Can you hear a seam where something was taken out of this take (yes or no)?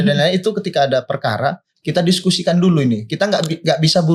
no